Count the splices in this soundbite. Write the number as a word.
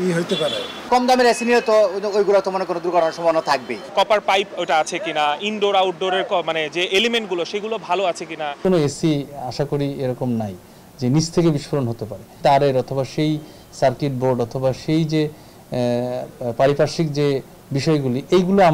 three